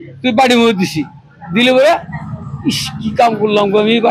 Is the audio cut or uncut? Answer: uncut